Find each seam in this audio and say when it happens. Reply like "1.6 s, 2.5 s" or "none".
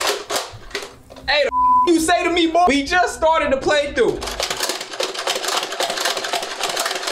2.7 s